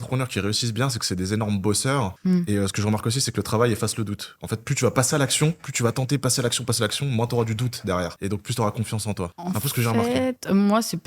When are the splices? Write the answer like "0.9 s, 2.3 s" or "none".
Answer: none